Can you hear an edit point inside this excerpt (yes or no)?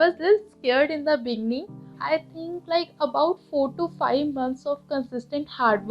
yes